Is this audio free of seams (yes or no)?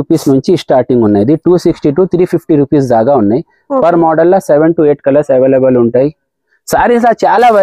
yes